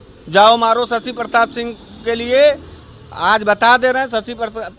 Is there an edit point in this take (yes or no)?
no